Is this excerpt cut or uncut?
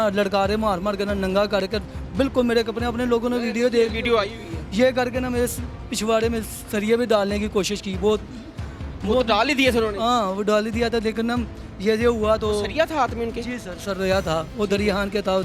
uncut